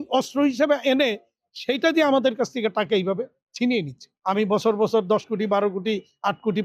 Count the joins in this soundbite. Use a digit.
1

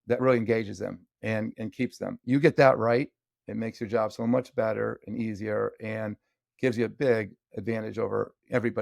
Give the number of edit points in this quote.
1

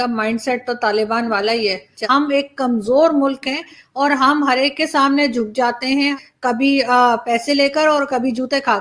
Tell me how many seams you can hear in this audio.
2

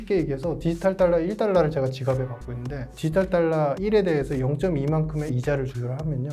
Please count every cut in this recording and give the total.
3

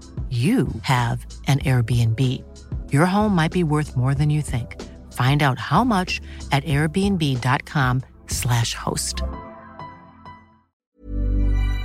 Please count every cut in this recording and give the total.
1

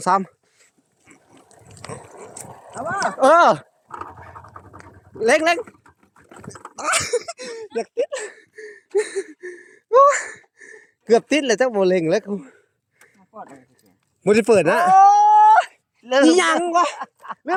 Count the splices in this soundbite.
0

